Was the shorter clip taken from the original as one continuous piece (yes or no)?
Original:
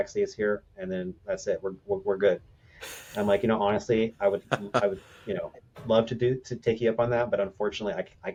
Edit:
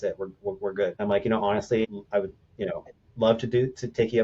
no